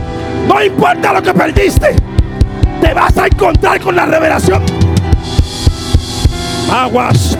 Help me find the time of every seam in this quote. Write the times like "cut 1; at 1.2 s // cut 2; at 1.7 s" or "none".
none